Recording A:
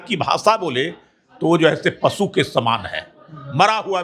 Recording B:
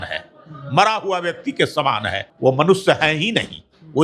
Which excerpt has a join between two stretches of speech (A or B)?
B